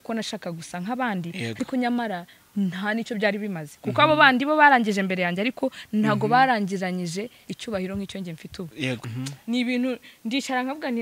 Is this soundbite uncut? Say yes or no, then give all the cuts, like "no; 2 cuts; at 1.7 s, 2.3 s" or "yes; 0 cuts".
no; 1 cut; at 9.0 s